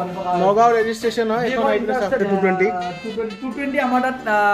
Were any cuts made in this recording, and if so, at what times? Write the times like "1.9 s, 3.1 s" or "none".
2.2 s